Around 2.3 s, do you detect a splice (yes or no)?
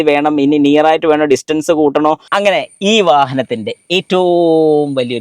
yes